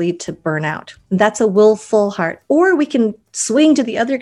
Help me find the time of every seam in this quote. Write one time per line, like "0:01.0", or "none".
0:00.9